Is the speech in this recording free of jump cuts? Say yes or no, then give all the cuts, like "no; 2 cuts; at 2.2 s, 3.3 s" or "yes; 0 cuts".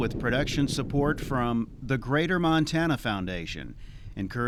yes; 0 cuts